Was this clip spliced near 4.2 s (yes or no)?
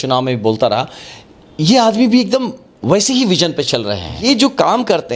yes